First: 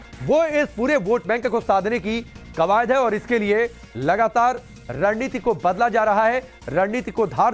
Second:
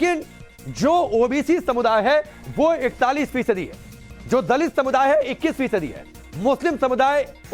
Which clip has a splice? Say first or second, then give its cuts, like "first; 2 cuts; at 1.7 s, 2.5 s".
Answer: first; 1 cut; at 2.6 s